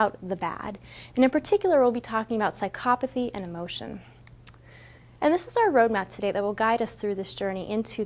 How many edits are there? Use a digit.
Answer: 1